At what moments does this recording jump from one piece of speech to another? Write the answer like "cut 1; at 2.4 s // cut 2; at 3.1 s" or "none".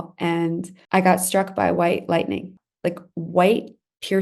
cut 1; at 2.5 s